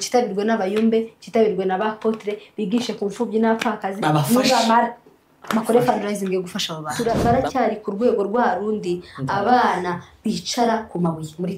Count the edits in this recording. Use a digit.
1